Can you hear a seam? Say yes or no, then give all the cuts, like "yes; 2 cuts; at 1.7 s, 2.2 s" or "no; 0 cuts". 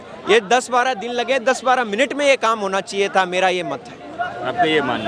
no; 0 cuts